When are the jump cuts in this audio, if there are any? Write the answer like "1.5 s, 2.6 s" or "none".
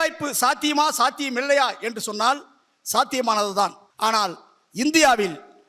3.8 s